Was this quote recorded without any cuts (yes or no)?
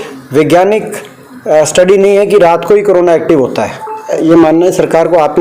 no